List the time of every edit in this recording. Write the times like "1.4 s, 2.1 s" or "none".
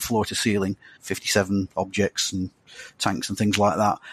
1.0 s